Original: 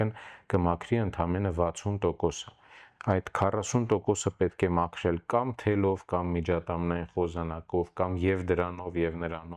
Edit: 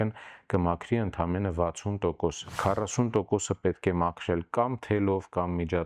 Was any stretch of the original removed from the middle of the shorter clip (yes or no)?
yes